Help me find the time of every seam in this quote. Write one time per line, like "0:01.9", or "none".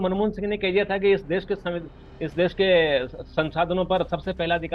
none